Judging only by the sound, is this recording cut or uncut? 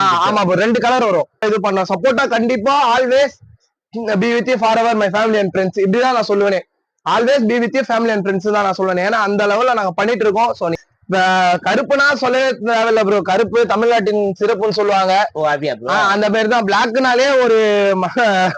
cut